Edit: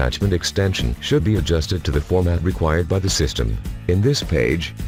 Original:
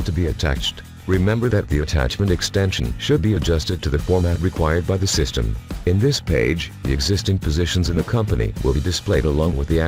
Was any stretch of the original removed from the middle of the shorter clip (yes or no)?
no